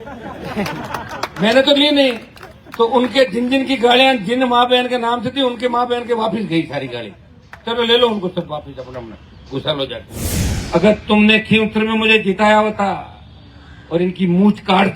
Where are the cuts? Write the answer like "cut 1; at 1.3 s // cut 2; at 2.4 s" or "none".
cut 1; at 10.6 s